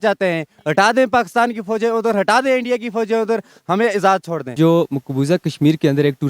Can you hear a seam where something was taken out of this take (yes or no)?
yes